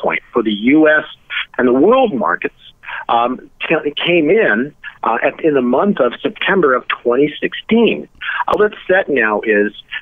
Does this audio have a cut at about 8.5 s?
yes; 1 cut; at 8.5 s

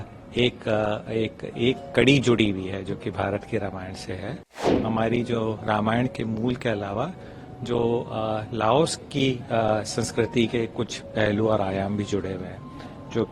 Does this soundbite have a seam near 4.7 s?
yes; 1 cut; at 4.7 s

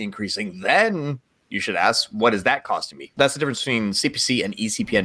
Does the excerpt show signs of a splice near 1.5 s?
no; 1 cut; at 3.1 s

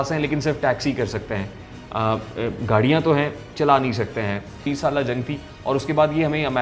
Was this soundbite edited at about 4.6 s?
yes; 1 cut; at 4.6 s

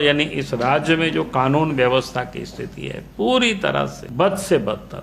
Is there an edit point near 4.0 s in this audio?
yes; 1 cut; at 4.0 s

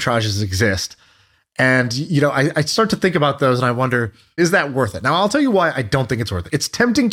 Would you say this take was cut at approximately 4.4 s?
yes; 1 cut; at 4.4 s

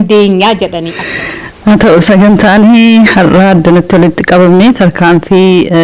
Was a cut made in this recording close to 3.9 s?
no; 1 cut; at 1.0 s

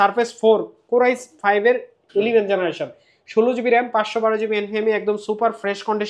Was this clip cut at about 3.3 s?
no; 0 cuts

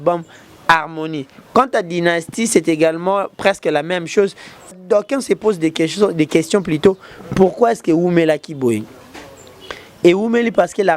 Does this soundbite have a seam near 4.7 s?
yes; 1 cut; at 4.7 s

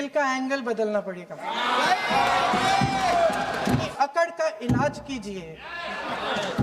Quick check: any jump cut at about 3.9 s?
yes; 1 cut; at 3.9 s

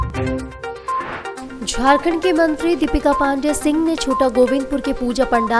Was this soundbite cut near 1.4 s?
no; 0 cuts

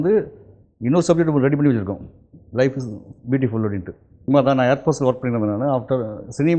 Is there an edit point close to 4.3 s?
yes; 1 cut; at 4.3 s

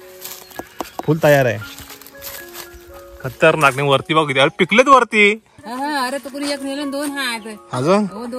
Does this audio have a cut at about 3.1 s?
no; 1 cut; at 5.6 s

